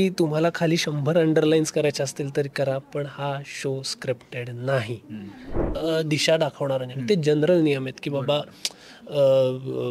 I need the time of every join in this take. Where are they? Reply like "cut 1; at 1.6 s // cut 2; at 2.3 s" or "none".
cut 1; at 5.6 s